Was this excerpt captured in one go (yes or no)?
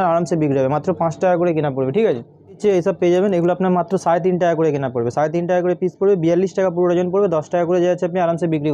yes